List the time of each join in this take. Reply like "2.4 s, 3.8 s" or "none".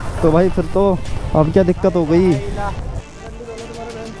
1.1 s, 3.1 s